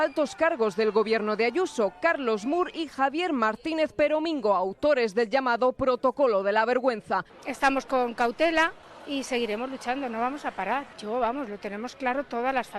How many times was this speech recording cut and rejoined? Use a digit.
3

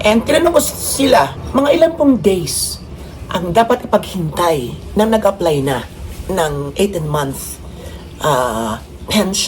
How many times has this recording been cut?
1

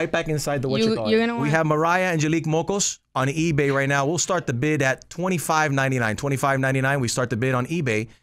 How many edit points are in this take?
1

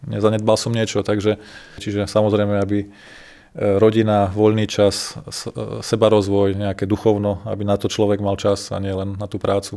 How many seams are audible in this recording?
1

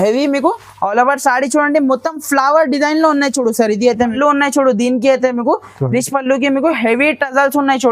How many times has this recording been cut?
1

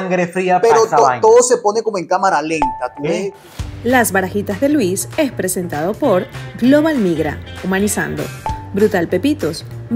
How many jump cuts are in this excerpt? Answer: 1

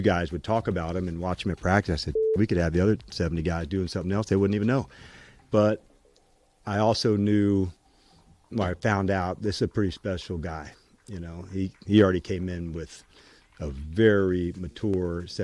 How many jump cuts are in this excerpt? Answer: 0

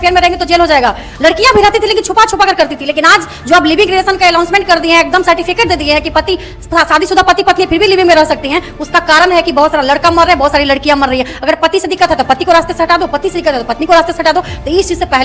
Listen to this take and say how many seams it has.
0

